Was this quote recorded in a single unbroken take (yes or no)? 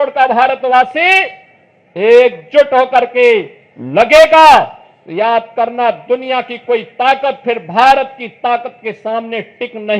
yes